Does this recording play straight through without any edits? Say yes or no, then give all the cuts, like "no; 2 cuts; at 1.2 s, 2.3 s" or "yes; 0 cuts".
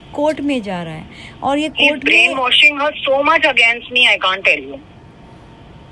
yes; 0 cuts